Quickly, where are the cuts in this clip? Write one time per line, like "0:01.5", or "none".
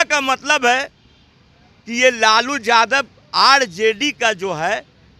none